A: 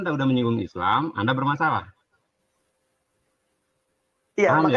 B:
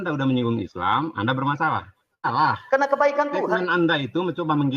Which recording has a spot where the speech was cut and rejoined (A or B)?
B